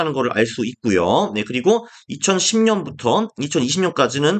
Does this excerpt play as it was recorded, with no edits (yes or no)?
yes